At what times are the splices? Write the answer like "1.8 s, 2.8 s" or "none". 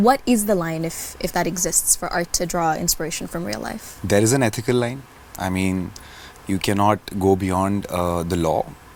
none